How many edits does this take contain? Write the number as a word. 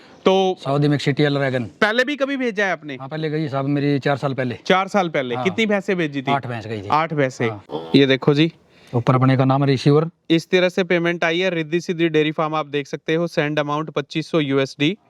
one